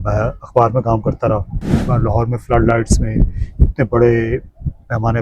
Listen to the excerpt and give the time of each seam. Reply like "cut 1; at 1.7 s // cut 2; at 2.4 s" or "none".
cut 1; at 1.8 s